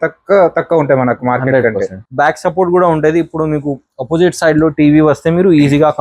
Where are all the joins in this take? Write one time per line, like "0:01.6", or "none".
0:02.0